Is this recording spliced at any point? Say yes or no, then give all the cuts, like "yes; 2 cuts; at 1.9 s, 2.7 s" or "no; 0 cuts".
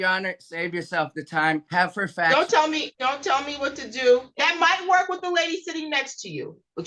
yes; 3 cuts; at 1.7 s, 2.9 s, 4.2 s